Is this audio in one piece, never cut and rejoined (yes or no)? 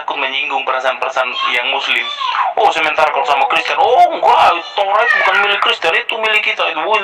yes